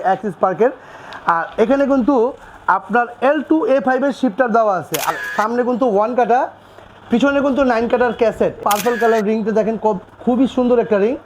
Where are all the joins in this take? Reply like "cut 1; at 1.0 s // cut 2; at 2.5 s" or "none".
cut 1; at 5.1 s // cut 2; at 8.6 s